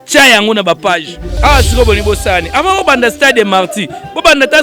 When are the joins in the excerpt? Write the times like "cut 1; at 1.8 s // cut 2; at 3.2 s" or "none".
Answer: cut 1; at 1.2 s